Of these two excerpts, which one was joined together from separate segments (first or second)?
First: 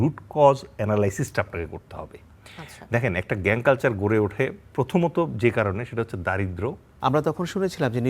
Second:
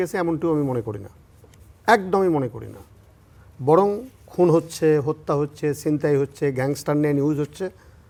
first